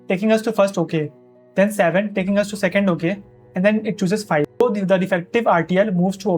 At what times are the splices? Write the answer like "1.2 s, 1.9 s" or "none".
4.6 s